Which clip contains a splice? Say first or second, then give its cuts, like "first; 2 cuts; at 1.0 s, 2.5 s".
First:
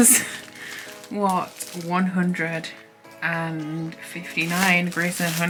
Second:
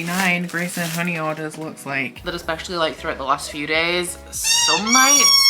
second; 1 cut; at 2.2 s